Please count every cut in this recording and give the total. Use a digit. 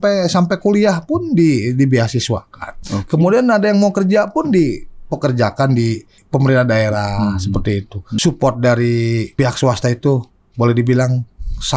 3